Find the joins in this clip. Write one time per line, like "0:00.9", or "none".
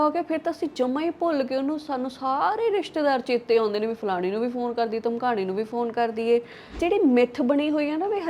0:06.8

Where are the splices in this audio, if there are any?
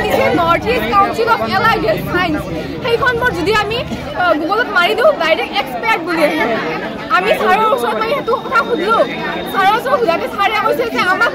none

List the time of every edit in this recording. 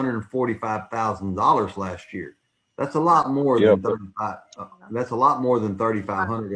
none

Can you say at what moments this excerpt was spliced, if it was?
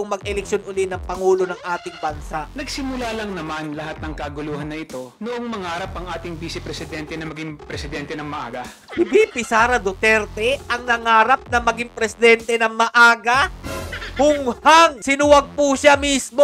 0:02.5
0:08.8
0:15.0

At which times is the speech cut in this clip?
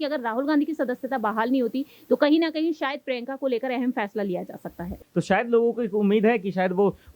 0:04.9

